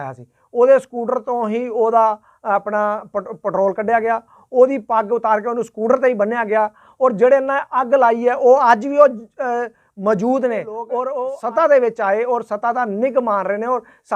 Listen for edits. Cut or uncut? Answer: cut